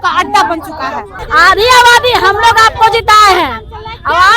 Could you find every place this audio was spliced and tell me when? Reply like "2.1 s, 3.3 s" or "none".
1.2 s